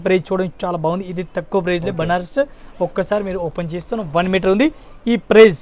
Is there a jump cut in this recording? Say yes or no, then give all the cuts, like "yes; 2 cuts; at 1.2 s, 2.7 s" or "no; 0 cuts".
no; 0 cuts